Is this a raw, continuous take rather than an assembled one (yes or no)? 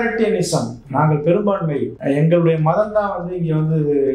no